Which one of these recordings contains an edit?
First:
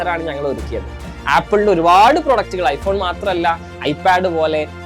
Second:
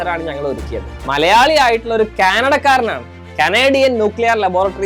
second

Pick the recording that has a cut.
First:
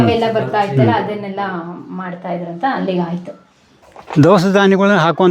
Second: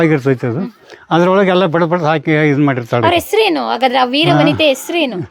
first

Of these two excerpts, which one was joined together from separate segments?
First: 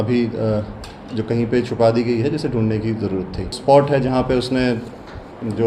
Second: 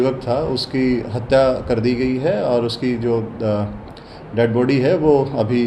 first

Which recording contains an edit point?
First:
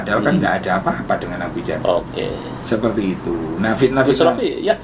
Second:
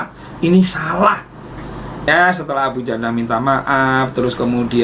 second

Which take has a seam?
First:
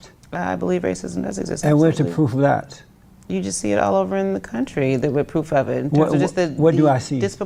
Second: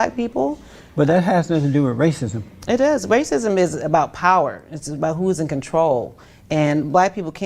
second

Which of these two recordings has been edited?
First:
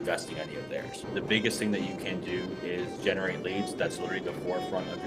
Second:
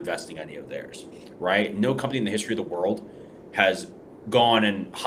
first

